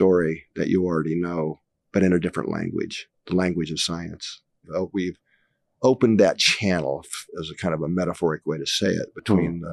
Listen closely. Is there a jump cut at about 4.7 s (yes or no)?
yes